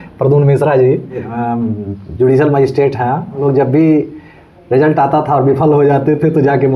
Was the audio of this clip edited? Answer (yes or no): yes